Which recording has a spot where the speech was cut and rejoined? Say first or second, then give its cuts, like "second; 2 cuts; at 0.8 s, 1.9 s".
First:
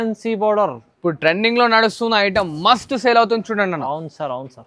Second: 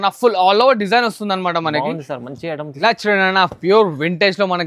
second; 1 cut; at 2.7 s